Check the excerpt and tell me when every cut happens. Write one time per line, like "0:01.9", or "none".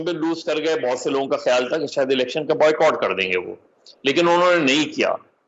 none